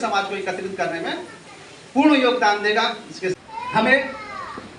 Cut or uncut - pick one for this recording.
cut